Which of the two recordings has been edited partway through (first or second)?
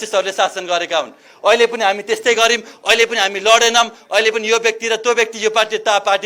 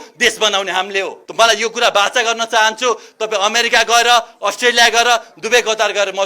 second